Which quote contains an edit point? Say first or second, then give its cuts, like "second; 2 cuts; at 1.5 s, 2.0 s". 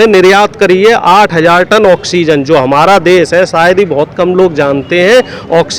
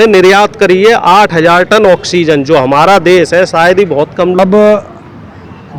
second; 1 cut; at 4.4 s